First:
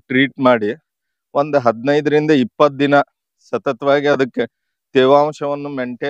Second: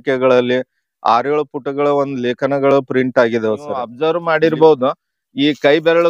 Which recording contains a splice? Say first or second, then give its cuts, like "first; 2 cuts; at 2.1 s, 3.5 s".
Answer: second; 1 cut; at 3.9 s